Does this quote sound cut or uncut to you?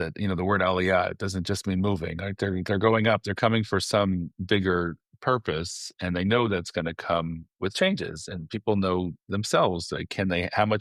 uncut